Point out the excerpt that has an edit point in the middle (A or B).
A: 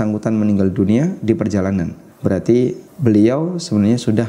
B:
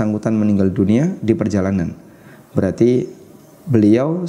A